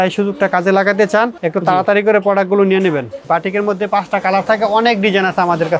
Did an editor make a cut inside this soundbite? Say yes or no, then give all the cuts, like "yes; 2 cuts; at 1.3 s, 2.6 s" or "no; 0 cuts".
yes; 2 cuts; at 1.4 s, 3.2 s